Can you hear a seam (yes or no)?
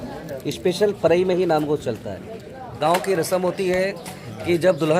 yes